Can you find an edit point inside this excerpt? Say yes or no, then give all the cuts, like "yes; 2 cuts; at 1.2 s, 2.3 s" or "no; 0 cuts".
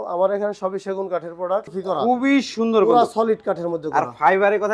yes; 1 cut; at 1.7 s